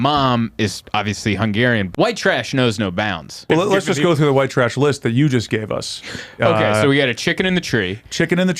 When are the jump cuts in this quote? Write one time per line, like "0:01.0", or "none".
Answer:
0:01.9
0:03.4